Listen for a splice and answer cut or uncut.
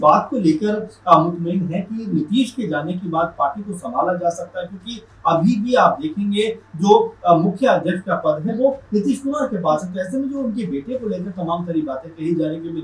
uncut